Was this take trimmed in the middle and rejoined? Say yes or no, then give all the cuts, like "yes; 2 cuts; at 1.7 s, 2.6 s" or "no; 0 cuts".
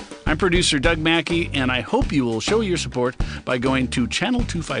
no; 0 cuts